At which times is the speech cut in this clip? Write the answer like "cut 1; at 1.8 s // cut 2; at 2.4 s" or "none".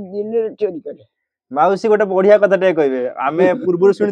none